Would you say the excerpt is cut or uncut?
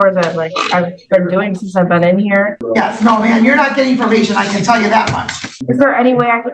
cut